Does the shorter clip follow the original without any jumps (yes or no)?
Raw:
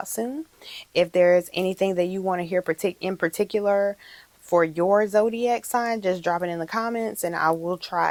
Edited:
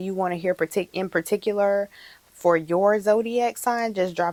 yes